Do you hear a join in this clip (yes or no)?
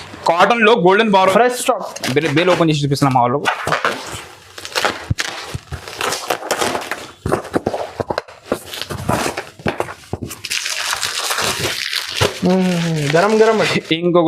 yes